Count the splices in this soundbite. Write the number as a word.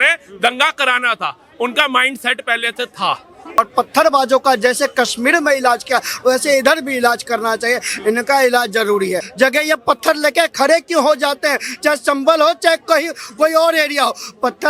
two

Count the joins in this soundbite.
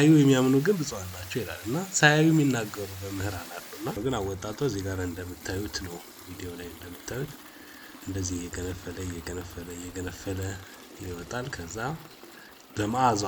one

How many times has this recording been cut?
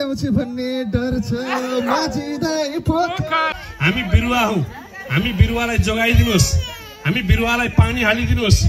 one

